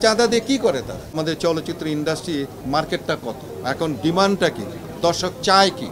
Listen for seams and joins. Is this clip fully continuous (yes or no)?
no